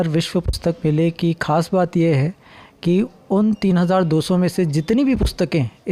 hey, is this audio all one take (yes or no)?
yes